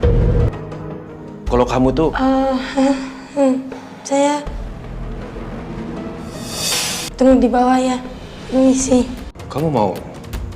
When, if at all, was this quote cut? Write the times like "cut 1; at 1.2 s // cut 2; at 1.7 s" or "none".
cut 1; at 9.4 s